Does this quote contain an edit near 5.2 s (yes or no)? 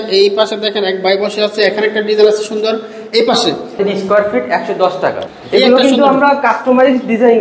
yes